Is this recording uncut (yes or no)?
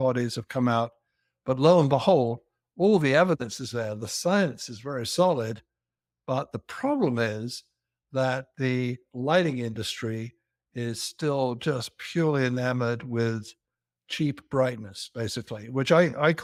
yes